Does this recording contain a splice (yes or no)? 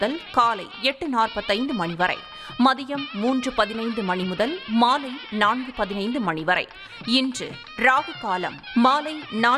no